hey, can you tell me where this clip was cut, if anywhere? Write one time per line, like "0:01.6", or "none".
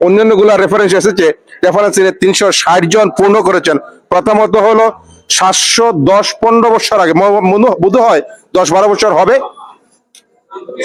none

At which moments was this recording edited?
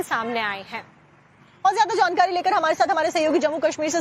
0:01.8

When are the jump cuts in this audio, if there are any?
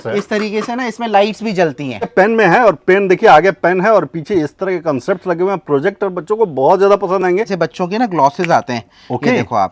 0:02.1
0:07.5

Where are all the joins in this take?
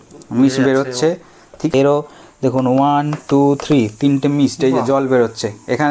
0:01.7

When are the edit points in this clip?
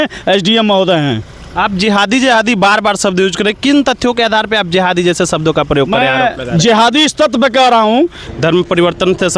0:08.2

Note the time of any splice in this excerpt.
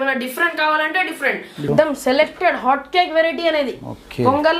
0:01.6

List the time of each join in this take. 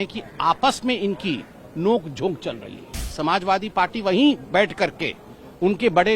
0:03.0

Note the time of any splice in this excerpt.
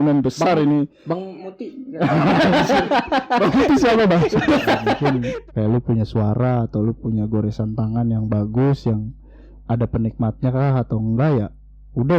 0:05.1

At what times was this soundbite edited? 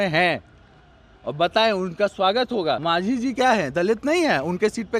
0:02.8

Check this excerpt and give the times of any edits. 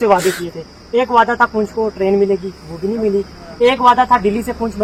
none

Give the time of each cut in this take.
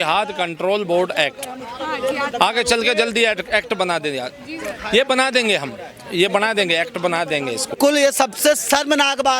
0:07.8

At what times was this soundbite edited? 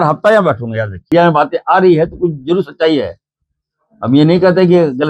0:01.1

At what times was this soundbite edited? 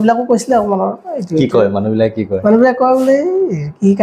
none

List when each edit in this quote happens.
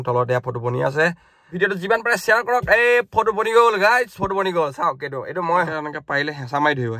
0:01.5
0:05.7

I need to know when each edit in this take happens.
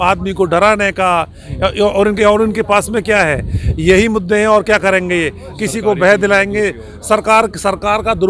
none

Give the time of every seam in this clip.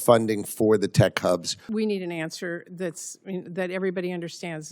0:01.6

